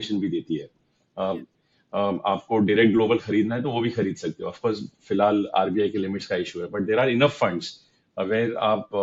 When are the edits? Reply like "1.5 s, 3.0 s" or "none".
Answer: none